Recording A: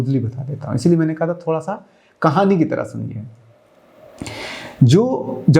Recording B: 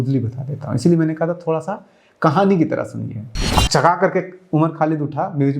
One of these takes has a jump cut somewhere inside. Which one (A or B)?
B